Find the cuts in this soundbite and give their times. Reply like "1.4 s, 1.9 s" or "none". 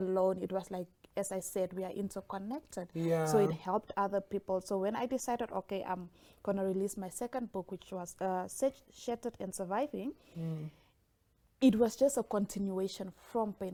none